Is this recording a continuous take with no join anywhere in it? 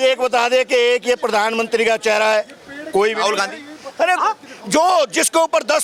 yes; 0 cuts

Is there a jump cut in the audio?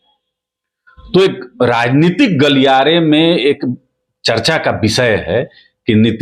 no; 0 cuts

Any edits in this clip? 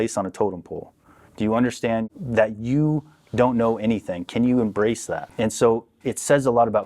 yes; 2 cuts; at 2.1 s, 5.2 s

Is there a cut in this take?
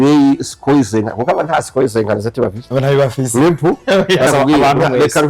yes; 1 cut; at 4.3 s

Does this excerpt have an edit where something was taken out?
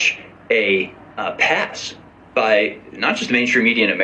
yes; 1 cut; at 1.0 s

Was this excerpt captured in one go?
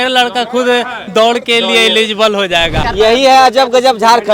no; 1 cut; at 2.8 s

